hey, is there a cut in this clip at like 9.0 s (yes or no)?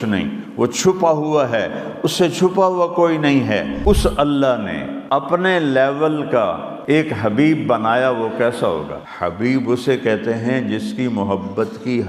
yes